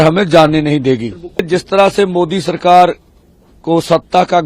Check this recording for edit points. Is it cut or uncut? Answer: cut